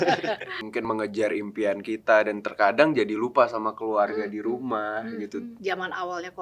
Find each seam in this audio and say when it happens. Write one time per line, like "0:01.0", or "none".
0:00.8
0:05.5